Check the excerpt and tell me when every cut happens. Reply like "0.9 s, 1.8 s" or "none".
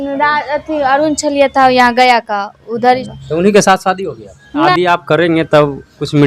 3.1 s, 4.7 s